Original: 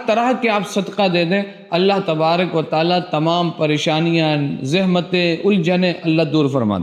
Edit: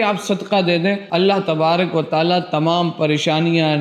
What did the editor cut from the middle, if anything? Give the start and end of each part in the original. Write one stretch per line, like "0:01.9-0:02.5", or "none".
0:01.5-0:01.6